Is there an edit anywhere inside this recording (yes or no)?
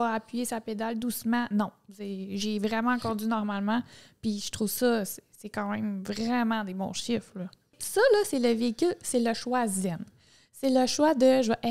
yes